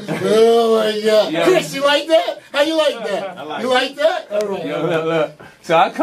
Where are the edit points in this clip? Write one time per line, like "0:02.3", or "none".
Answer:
0:04.4